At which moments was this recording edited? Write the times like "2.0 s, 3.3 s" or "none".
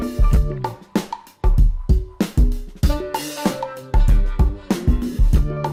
none